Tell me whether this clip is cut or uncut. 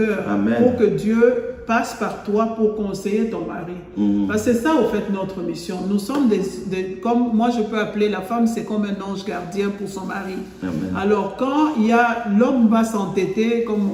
uncut